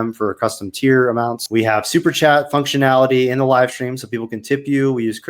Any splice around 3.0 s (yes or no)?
no